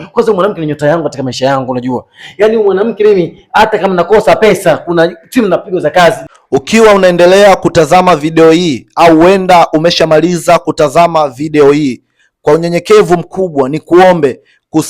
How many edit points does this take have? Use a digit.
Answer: 1